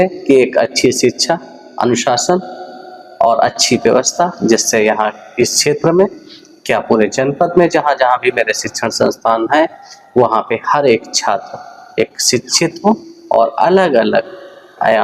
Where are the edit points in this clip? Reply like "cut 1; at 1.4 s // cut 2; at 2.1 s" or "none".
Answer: none